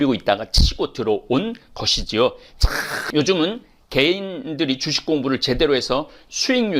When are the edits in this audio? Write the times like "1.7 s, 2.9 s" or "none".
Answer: 3.0 s